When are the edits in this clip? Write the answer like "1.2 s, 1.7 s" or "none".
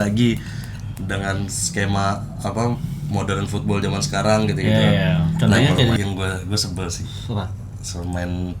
6.0 s